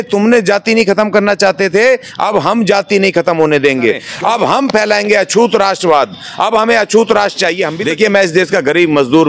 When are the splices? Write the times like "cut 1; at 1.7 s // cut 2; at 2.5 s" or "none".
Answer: cut 1; at 4.1 s // cut 2; at 7.7 s